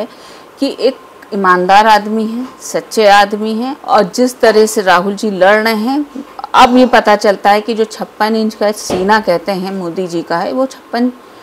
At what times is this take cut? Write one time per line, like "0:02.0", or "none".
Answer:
0:03.7